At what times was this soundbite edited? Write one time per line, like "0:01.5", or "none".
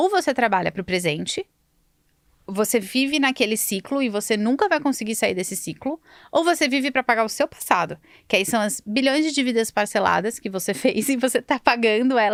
none